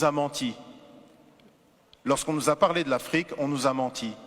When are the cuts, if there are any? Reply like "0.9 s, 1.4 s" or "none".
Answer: 1.5 s